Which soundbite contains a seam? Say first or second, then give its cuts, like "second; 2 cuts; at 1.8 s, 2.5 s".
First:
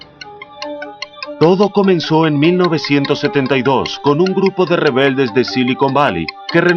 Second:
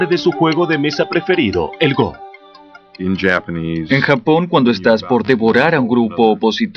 first; 1 cut; at 1.5 s